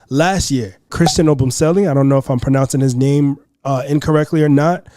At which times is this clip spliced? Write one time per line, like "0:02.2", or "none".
0:00.9